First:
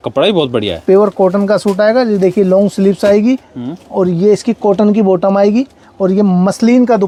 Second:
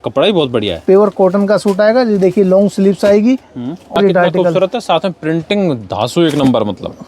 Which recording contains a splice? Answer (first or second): second